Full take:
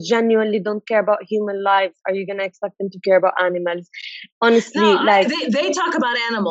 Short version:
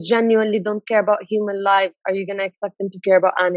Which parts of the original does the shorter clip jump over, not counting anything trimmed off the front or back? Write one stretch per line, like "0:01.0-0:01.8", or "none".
none